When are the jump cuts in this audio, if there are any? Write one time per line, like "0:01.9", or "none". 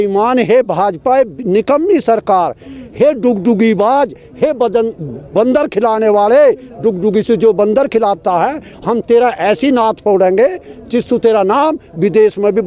none